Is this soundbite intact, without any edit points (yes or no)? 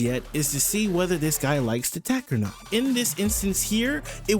no